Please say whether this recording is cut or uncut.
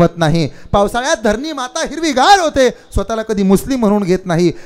uncut